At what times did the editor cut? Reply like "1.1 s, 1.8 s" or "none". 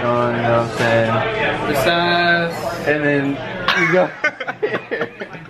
none